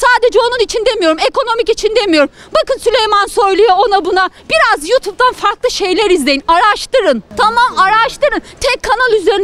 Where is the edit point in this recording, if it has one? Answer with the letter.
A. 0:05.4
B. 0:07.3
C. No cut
B